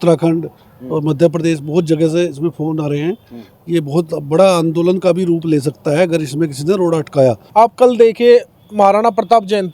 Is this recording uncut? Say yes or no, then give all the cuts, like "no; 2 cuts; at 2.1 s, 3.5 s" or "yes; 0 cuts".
no; 1 cut; at 7.4 s